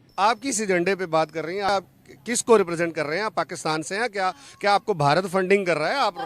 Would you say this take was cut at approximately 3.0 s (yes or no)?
no